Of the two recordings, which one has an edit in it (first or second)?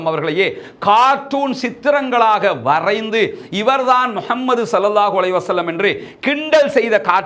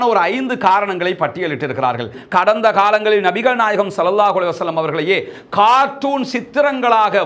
second